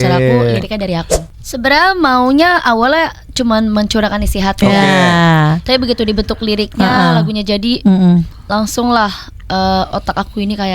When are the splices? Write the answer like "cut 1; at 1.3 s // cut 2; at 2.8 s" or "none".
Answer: cut 1; at 1.2 s